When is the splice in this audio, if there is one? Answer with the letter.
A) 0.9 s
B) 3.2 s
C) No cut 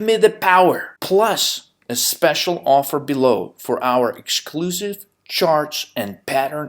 A